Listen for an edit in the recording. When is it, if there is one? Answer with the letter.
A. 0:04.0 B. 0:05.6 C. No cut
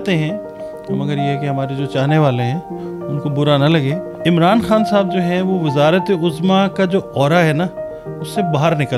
A